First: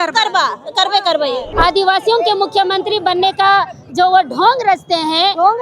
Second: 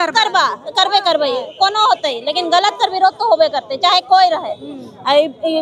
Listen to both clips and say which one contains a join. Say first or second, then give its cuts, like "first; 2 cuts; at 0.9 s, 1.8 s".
first; 1 cut; at 1.5 s